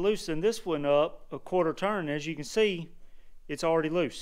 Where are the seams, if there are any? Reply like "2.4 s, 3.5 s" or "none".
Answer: none